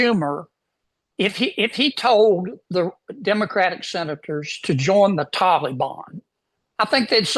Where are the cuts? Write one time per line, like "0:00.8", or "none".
none